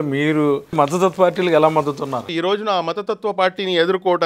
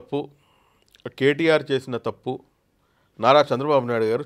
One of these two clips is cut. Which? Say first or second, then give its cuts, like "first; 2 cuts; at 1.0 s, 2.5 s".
first; 2 cuts; at 0.8 s, 2.3 s